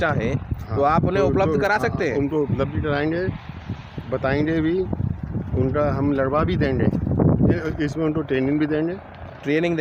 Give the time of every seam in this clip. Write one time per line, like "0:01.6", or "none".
0:07.6

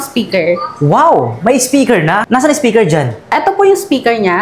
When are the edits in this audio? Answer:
0:02.2

